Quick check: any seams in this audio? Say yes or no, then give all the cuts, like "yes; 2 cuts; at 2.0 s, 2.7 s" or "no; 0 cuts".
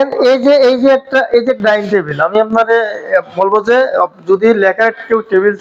no; 0 cuts